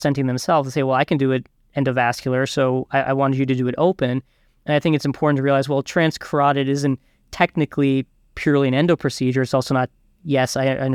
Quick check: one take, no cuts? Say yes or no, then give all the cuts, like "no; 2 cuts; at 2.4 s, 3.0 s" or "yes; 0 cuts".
yes; 0 cuts